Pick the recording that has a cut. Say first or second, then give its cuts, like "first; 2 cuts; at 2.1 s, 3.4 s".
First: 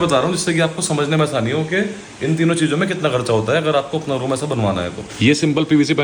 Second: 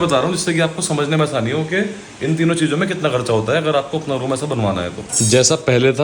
second; 1 cut; at 5.0 s